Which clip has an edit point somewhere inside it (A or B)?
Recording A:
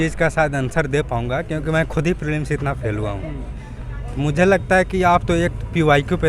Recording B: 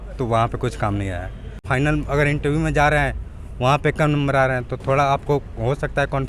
B